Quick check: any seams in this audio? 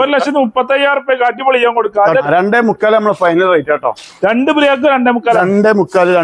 yes; 1 cut; at 2.2 s

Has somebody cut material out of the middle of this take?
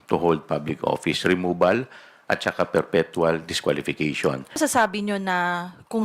yes; 1 cut; at 4.6 s

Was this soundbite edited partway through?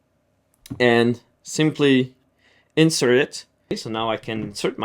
yes; 1 cut; at 3.8 s

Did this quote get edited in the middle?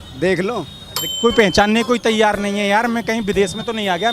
yes; 1 cut; at 1.1 s

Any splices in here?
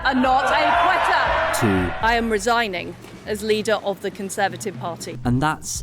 no; 0 cuts

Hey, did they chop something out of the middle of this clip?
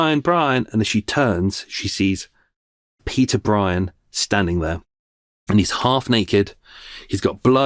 no; 0 cuts

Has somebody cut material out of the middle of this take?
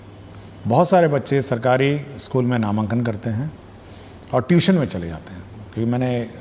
no; 0 cuts

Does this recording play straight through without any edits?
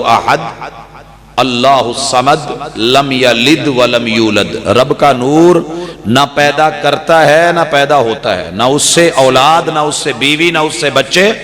yes; 0 cuts

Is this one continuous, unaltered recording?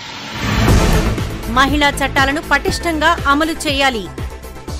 yes; 0 cuts

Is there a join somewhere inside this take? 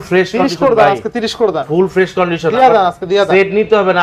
no; 0 cuts

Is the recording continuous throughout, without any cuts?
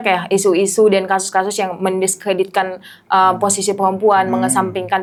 yes; 0 cuts

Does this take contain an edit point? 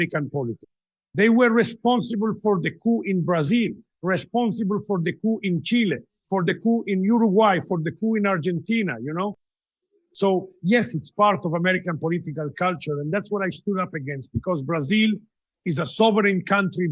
no; 0 cuts

